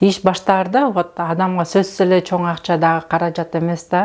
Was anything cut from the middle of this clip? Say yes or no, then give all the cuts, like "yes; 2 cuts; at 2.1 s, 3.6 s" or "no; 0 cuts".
no; 0 cuts